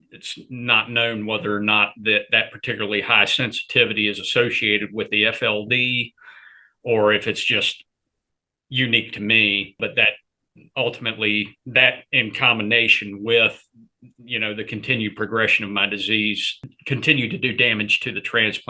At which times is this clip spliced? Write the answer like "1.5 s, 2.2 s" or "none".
9.8 s, 16.5 s